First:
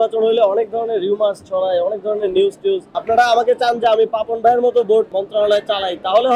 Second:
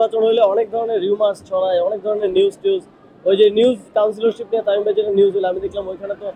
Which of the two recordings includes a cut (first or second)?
first